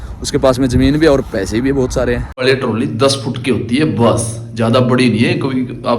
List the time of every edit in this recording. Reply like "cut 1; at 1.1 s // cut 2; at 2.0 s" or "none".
cut 1; at 2.4 s